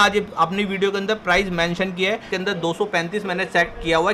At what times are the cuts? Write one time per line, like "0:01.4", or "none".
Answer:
0:02.3